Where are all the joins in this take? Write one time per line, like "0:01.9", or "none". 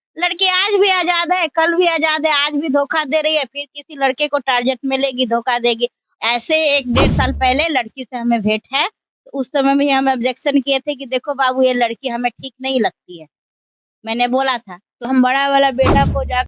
0:06.0
0:15.1